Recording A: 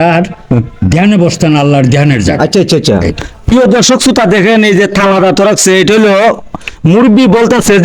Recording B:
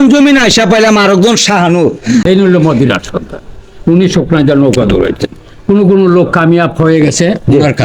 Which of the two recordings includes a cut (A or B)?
B